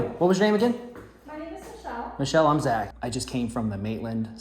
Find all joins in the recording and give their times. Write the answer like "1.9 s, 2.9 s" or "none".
2.9 s